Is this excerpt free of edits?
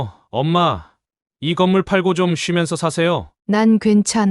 no; 1 cut; at 3.3 s

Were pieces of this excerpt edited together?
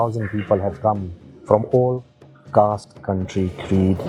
no; 0 cuts

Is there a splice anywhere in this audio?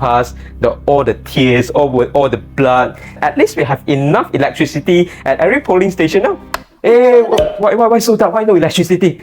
yes; 1 cut; at 3.2 s

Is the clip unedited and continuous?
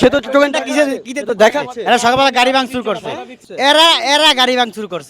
yes; 0 cuts

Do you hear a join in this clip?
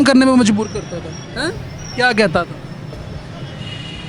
no; 0 cuts

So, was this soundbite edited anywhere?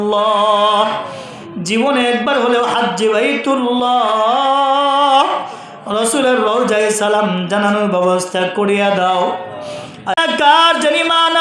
yes; 1 cut; at 10.2 s

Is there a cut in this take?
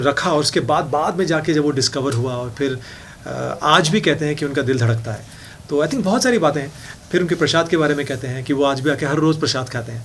no; 0 cuts

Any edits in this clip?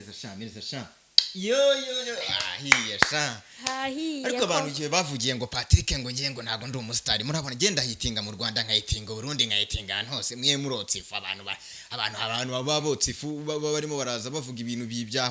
no; 0 cuts

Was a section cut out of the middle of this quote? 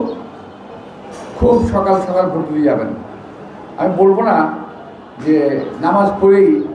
no; 0 cuts

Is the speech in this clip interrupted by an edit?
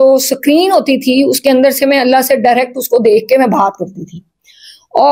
no; 0 cuts

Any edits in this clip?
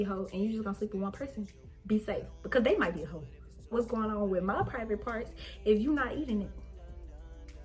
yes; 1 cut; at 3.7 s

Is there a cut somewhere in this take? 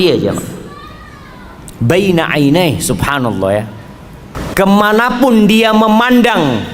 yes; 1 cut; at 4.4 s

